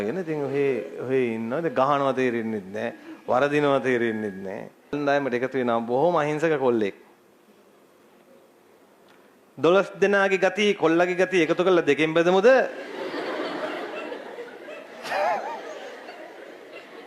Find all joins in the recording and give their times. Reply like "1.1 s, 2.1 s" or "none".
4.9 s

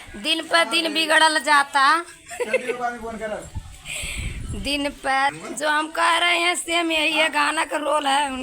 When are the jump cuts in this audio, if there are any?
5.4 s

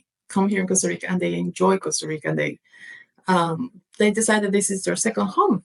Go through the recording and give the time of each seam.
none

